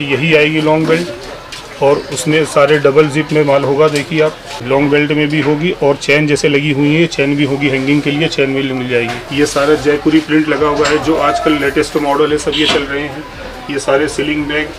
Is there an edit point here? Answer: yes; 2 cuts; at 4.5 s, 9.2 s

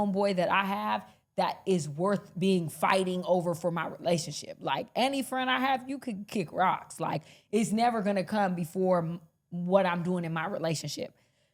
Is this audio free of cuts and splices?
yes; 0 cuts

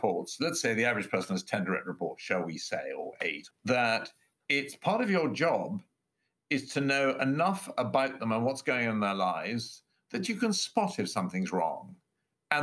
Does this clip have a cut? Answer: yes; 1 cut; at 3.5 s

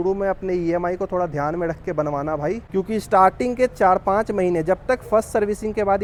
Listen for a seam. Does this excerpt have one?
no; 0 cuts

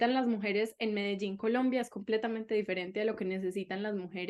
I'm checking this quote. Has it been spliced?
no; 0 cuts

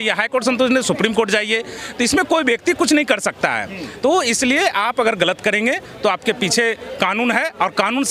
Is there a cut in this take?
no; 0 cuts

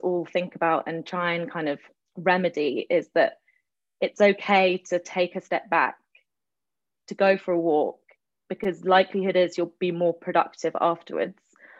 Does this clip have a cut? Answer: no; 0 cuts

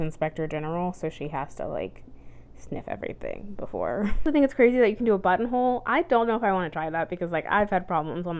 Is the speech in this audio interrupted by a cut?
yes; 1 cut; at 4.2 s

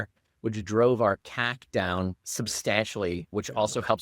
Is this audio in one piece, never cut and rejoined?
no; 2 cuts; at 2.2 s, 3.2 s

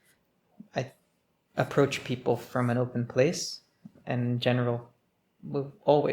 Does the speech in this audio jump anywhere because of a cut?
yes; 1 cut; at 3.9 s

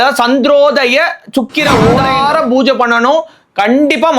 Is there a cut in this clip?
yes; 1 cut; at 2.0 s

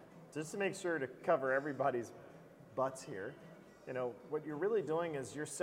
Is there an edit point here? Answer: no; 0 cuts

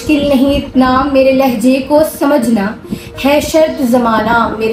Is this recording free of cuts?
yes; 0 cuts

